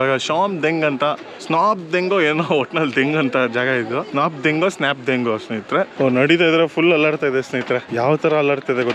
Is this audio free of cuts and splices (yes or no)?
no